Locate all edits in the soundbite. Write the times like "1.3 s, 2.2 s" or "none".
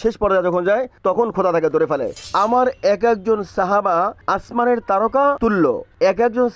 2.2 s